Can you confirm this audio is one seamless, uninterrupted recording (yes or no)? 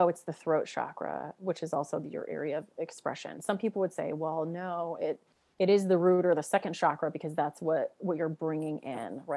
yes